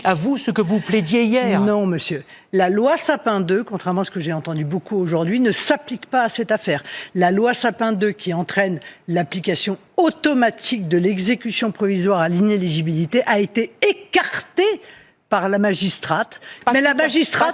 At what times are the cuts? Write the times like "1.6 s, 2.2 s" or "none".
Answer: none